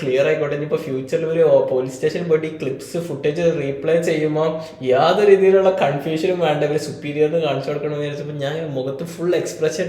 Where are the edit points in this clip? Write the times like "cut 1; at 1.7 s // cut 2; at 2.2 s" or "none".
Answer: none